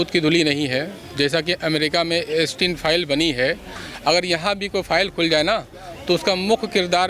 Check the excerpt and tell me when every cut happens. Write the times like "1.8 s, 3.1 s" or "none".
none